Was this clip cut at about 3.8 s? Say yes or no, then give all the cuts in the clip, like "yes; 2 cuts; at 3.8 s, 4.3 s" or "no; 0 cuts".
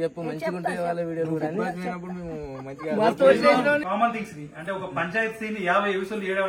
yes; 1 cut; at 3.8 s